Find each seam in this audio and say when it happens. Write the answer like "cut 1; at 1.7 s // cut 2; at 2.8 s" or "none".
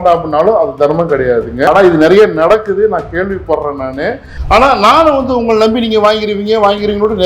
cut 1; at 1.7 s // cut 2; at 4.3 s